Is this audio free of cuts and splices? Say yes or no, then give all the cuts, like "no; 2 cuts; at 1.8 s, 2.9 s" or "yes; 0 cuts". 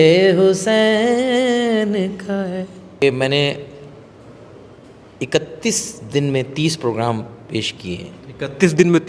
no; 1 cut; at 3.0 s